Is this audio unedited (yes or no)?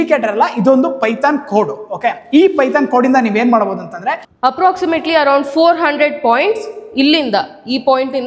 no